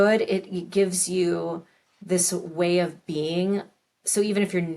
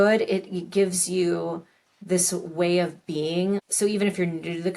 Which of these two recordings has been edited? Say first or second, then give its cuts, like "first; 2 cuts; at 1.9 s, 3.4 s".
second; 1 cut; at 3.7 s